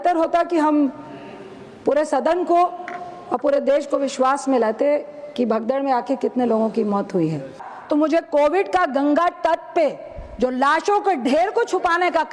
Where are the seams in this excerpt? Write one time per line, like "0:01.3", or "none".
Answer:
0:07.7

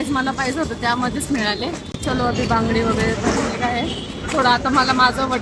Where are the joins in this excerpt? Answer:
none

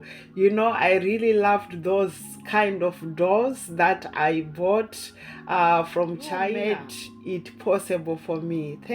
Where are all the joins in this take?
0:06.6

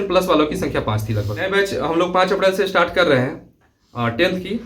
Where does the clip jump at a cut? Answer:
0:01.5

